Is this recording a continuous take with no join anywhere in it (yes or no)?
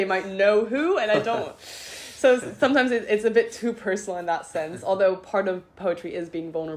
yes